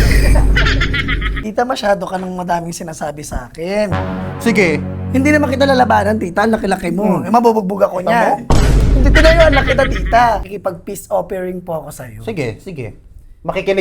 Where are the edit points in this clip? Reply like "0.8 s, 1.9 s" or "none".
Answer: 1.3 s, 10.5 s